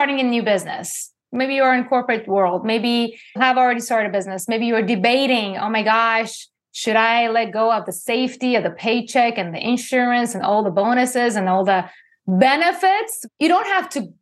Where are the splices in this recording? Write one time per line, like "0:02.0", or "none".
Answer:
0:01.1
0:03.4
0:13.2